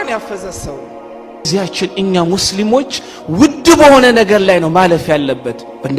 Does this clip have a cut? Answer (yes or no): yes